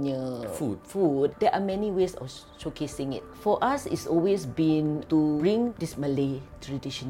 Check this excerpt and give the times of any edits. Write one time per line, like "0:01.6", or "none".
0:01.3
0:03.3
0:05.7